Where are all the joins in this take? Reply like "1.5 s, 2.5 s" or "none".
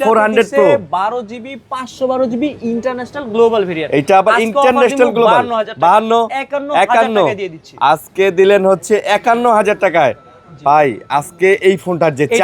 none